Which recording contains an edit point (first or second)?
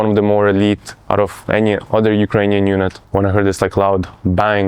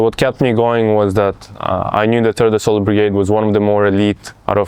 first